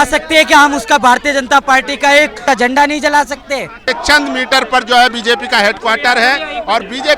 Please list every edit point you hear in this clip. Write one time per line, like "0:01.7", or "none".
0:02.4
0:03.9